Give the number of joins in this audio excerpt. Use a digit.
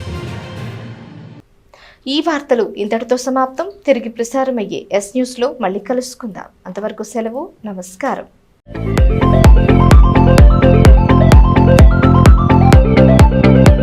0